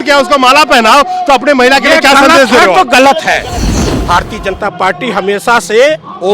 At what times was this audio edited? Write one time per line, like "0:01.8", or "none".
0:03.7